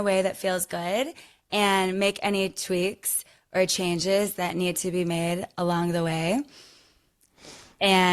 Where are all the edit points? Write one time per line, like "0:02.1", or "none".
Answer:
none